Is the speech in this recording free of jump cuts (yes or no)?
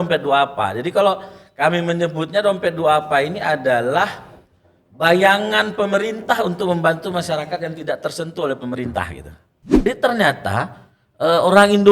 no